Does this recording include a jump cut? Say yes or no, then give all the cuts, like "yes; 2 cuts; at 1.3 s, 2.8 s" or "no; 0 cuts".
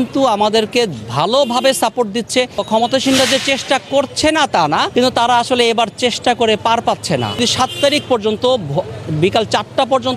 yes; 3 cuts; at 2.6 s, 4.9 s, 7.4 s